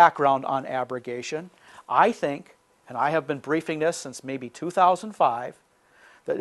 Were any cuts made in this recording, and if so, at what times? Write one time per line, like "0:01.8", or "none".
none